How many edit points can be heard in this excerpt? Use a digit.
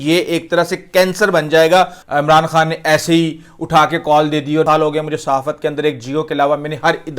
2